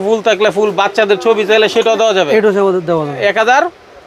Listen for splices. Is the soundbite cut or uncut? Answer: uncut